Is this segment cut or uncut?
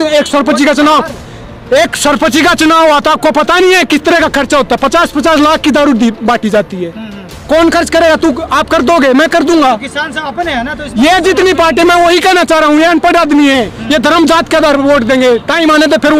uncut